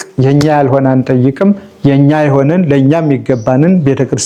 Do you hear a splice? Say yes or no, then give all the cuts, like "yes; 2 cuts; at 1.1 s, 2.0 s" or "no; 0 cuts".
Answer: no; 0 cuts